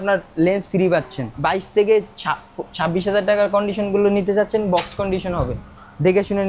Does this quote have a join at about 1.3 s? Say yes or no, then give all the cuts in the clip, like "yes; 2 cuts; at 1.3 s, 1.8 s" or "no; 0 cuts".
yes; 1 cut; at 1.3 s